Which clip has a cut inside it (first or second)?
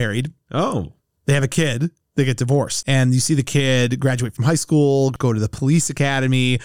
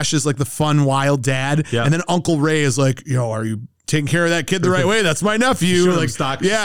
first